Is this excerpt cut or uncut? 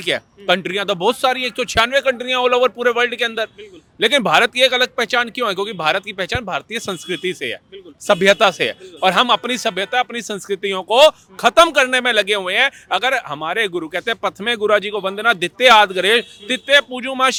uncut